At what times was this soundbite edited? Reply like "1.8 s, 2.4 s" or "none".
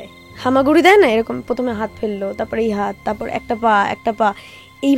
none